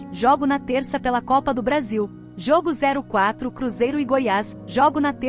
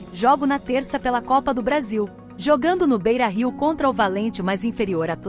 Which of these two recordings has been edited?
first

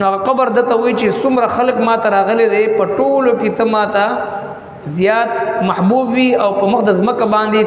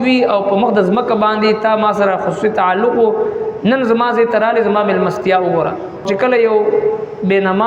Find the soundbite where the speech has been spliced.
second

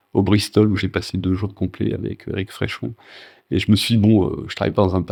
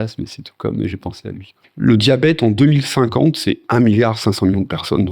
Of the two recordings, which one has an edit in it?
second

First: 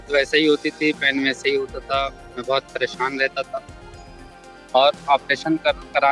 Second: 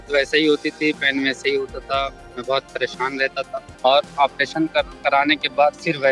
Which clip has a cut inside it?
second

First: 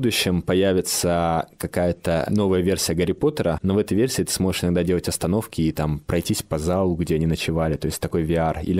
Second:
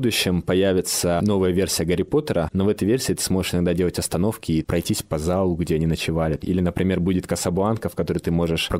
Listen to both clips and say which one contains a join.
second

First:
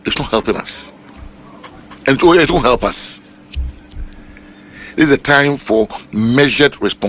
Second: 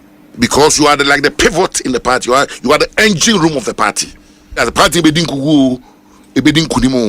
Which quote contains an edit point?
second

